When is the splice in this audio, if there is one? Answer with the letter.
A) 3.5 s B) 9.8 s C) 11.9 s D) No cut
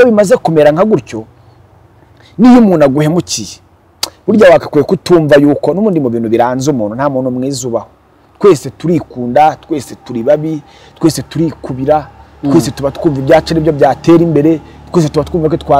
D